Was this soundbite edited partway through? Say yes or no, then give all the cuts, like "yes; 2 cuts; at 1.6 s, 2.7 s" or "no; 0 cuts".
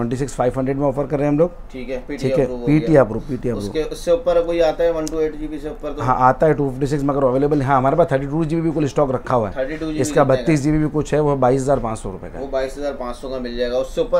no; 0 cuts